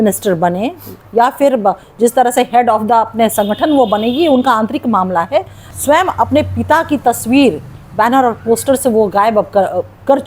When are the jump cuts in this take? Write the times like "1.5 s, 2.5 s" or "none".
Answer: 5.6 s